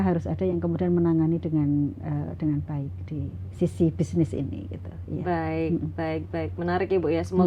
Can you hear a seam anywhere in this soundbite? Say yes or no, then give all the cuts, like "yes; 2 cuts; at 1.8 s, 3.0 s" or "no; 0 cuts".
no; 0 cuts